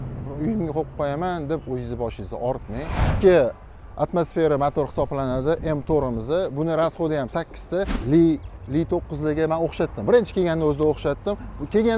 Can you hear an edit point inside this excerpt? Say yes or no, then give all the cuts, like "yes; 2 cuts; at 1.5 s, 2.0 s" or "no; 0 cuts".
yes; 2 cuts; at 3.0 s, 8.0 s